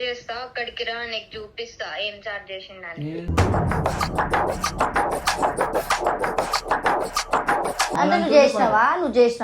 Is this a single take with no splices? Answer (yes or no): no